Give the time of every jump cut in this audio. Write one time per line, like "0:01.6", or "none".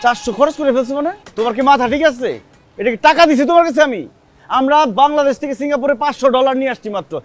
0:01.2